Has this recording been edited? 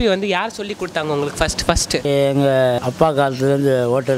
yes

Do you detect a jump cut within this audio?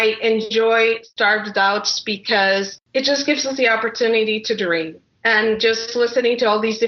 yes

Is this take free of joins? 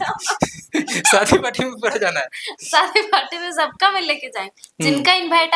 yes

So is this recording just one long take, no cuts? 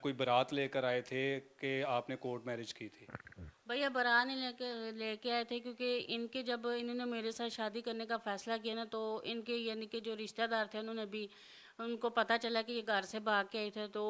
yes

